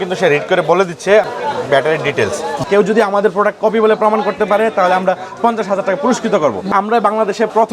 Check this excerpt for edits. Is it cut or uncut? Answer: cut